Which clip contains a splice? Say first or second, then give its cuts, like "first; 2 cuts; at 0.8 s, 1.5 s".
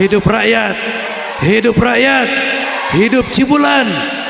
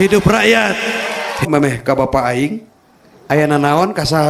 second; 1 cut; at 1.5 s